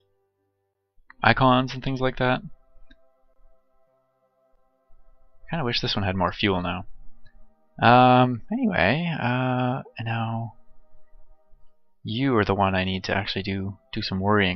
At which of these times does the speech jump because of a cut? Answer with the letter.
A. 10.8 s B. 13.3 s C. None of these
B